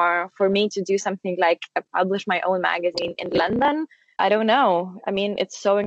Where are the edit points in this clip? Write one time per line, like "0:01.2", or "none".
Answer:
0:04.0